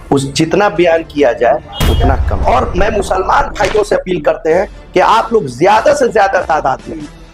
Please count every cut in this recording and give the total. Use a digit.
1